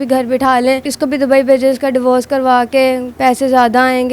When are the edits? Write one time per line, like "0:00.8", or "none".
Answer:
0:00.9